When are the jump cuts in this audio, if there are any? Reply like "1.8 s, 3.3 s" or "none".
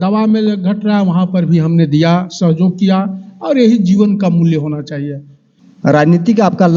5.6 s